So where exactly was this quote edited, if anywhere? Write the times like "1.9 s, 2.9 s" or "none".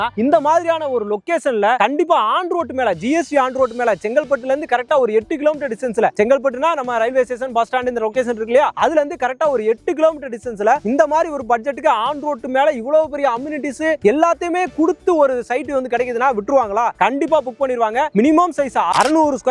18.1 s